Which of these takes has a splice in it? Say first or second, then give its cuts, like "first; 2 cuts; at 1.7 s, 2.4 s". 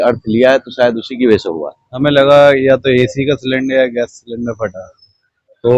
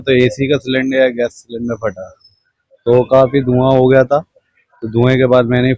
first; 1 cut; at 1.9 s